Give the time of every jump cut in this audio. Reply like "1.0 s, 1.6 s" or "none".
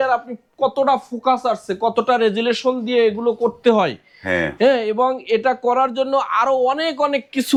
none